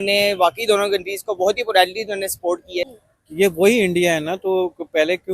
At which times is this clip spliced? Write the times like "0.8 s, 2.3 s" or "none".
2.9 s

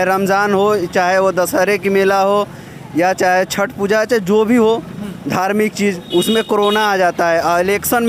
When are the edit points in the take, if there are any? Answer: none

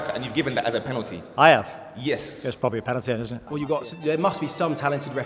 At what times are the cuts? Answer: 3.5 s

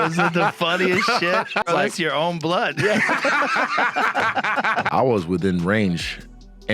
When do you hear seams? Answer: 1.7 s, 4.9 s

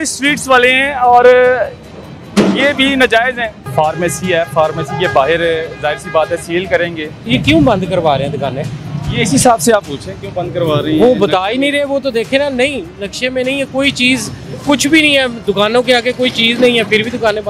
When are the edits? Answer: 3.6 s, 7.3 s

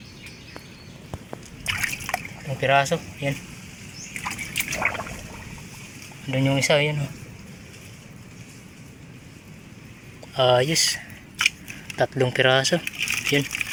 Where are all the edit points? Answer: none

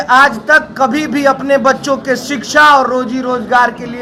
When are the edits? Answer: none

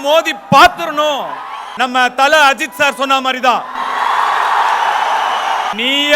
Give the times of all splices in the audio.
1.8 s

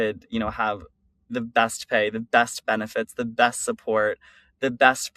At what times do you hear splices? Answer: none

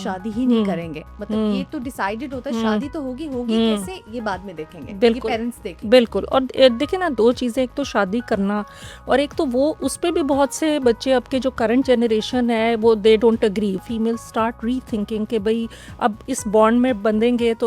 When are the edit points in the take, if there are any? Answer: 13.8 s

